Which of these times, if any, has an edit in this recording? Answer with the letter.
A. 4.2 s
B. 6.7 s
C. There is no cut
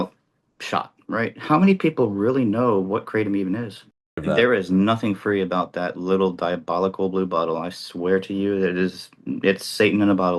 A